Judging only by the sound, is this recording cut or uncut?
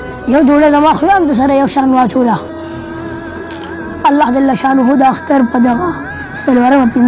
uncut